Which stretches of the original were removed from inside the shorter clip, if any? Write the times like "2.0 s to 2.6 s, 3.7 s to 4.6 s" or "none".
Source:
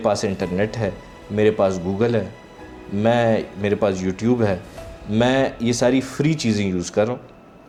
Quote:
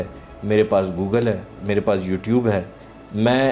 2.4 s to 3.5 s

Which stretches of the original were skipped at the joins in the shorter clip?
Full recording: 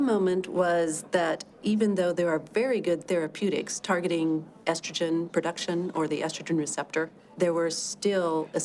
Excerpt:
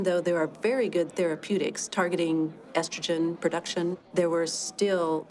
5.9 s to 7.2 s

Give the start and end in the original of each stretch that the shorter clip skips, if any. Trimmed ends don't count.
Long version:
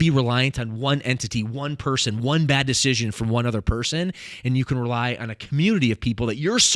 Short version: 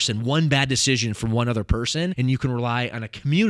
4.1 s to 4.4 s

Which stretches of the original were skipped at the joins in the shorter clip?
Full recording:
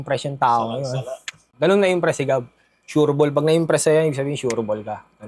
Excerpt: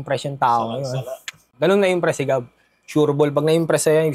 none

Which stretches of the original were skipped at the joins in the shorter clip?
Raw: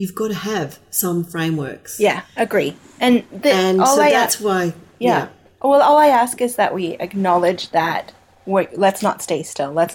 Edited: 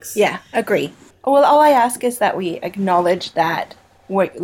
2.8 s to 5.4 s

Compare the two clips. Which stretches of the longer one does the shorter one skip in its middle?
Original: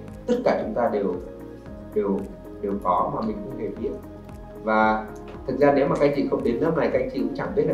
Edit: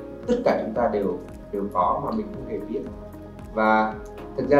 1.3 s to 2.4 s

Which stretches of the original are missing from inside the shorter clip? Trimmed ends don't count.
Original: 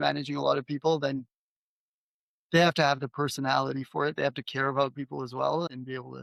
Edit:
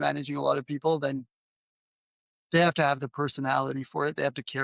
none

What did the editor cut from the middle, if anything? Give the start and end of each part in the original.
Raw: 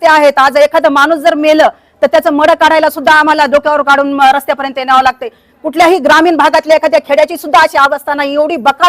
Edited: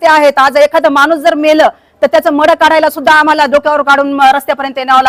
none

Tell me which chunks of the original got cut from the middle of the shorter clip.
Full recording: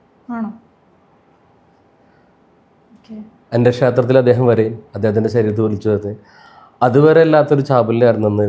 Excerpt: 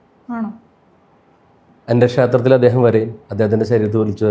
1.7 s to 3.4 s

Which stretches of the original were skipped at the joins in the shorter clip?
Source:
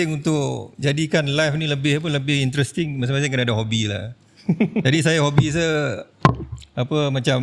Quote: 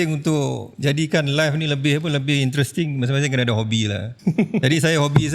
4.1 s to 4.3 s

